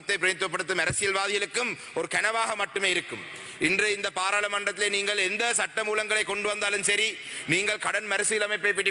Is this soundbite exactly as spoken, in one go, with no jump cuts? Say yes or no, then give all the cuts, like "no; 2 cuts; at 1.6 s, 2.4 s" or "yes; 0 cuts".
yes; 0 cuts